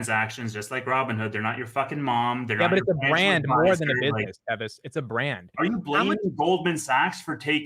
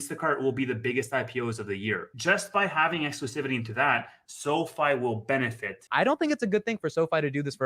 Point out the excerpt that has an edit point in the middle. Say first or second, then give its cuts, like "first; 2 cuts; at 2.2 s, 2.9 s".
second; 2 cuts; at 2.1 s, 5.8 s